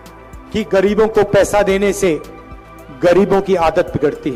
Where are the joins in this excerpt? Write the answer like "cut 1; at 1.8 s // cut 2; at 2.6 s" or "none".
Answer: none